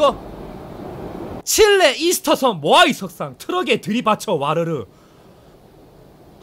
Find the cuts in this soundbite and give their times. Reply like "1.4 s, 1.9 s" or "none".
1.4 s